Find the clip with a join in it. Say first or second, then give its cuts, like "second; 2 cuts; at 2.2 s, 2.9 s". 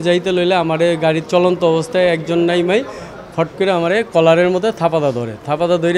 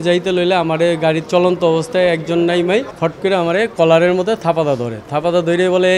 second; 1 cut; at 2.9 s